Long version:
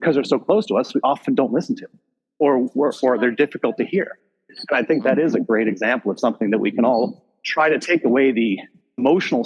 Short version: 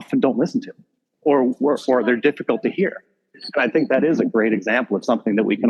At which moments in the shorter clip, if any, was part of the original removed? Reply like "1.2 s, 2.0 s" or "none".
none